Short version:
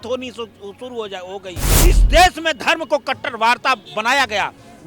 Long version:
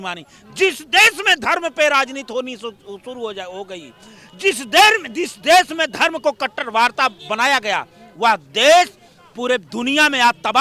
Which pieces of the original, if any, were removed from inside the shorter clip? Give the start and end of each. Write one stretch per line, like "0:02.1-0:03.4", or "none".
0:04.0-0:05.1